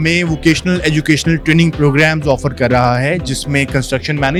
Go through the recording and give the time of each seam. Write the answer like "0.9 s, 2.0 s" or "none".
none